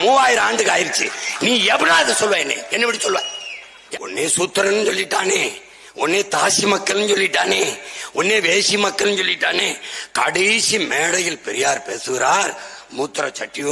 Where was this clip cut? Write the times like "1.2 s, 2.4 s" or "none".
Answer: 3.7 s

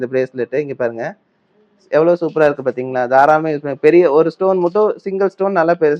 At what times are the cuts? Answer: none

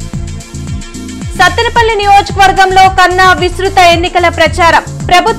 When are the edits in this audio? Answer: none

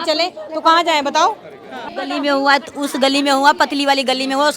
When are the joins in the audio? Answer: 1.9 s

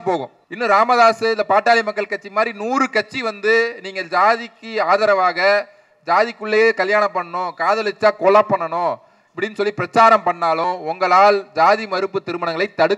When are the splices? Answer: none

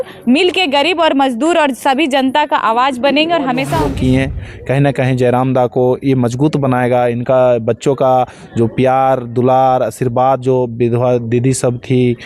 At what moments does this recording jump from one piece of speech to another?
3.7 s

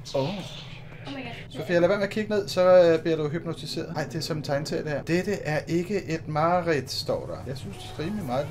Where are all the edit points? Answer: 1.4 s, 3.9 s, 5.0 s, 7.6 s

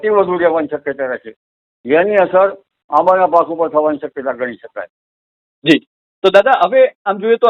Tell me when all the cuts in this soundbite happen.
none

